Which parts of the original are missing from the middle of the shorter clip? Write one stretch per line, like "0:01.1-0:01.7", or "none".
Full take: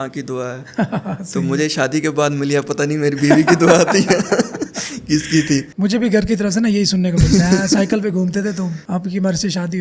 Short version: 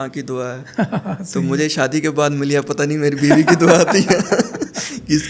none